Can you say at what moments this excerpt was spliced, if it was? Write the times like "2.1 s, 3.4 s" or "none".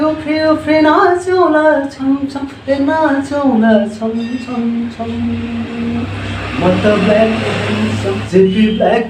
8.2 s